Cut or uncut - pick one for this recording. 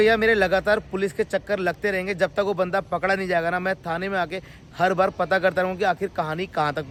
uncut